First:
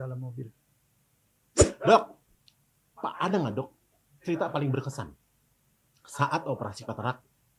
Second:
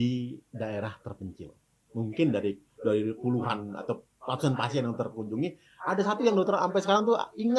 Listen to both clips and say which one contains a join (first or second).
first